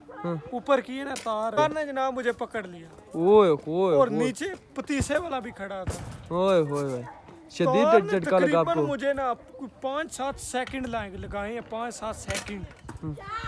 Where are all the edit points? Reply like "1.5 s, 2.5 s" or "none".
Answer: none